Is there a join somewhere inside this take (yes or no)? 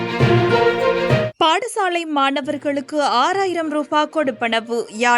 yes